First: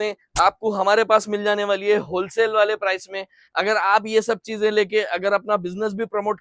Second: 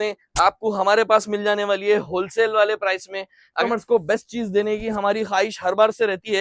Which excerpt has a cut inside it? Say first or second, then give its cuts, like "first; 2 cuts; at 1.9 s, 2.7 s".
second; 1 cut; at 3.5 s